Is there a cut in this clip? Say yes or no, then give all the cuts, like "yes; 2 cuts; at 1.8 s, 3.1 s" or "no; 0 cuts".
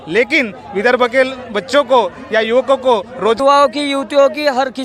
yes; 1 cut; at 3.4 s